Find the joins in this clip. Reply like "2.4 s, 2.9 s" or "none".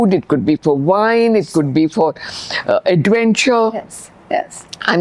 none